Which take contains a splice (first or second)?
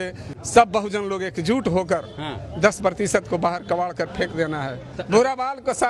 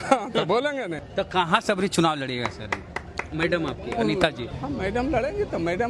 second